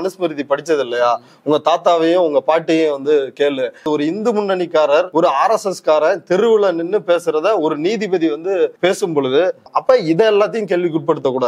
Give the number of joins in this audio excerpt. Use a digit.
4